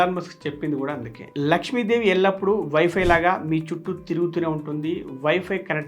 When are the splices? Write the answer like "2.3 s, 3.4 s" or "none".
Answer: 1.2 s